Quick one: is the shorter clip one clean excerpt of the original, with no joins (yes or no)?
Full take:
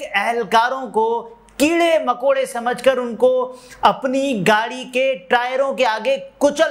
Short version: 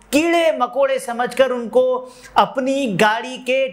yes